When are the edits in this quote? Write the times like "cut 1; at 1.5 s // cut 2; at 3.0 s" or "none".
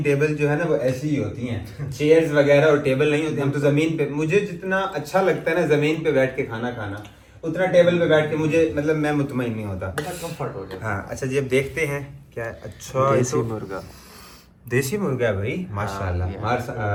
none